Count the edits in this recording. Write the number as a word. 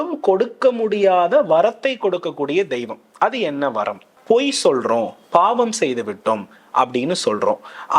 one